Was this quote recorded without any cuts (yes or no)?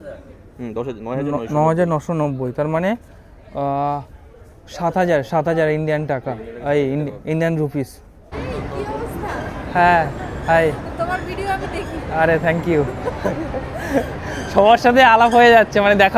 no